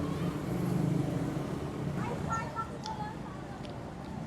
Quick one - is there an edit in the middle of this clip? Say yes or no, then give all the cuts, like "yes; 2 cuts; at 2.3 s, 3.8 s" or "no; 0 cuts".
yes; 1 cut; at 2.0 s